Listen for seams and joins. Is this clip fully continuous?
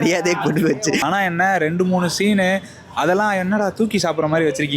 no; 1 cut; at 1.0 s

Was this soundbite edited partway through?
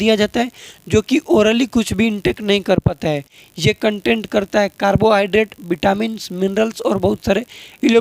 no; 0 cuts

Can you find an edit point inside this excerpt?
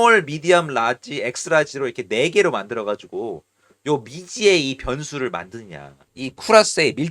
no; 0 cuts

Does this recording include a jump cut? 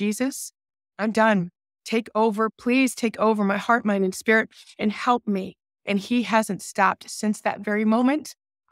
yes; 1 cut; at 2.5 s

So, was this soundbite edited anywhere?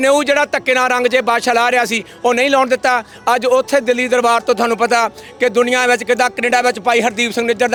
no; 0 cuts

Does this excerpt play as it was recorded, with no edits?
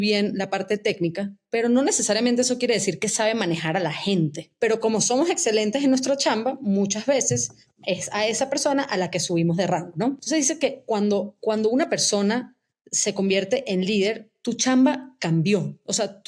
no; 3 cuts; at 4.4 s, 10.2 s, 14.3 s

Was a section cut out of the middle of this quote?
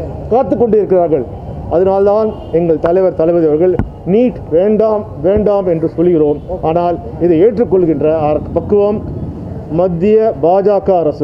no; 0 cuts

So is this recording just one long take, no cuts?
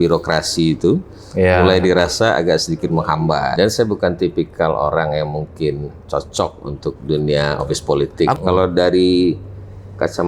no; 2 cuts; at 3.5 s, 8.4 s

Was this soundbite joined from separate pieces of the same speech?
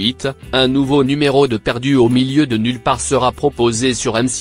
no; 0 cuts

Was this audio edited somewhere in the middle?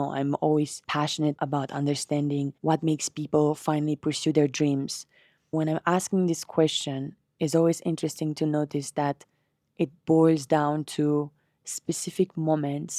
yes; 2 cuts; at 1.2 s, 2.5 s

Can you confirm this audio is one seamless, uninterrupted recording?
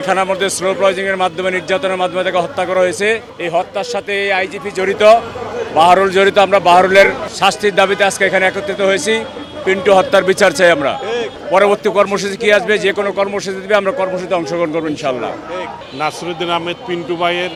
yes; 0 cuts

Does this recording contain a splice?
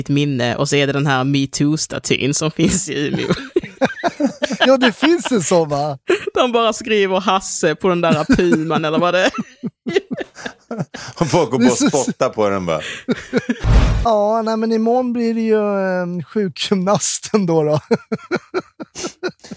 yes; 1 cut; at 13.6 s

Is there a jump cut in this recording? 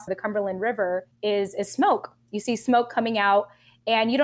no; 0 cuts

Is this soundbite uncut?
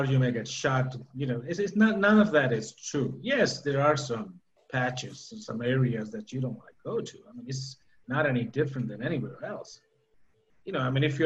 yes; 0 cuts

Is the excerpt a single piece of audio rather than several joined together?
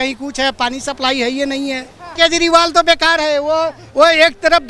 no; 1 cut; at 2.1 s

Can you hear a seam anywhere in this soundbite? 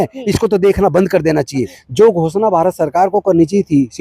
yes; 1 cut; at 1.8 s

